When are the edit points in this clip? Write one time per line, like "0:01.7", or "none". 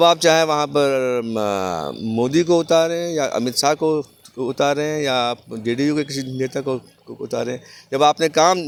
none